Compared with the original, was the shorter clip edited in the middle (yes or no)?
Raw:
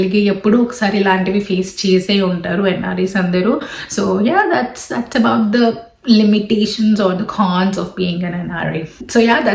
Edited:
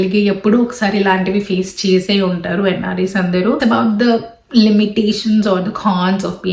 yes